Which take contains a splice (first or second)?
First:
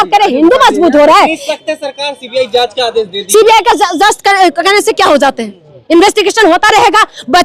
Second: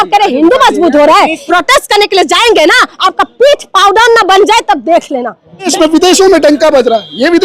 second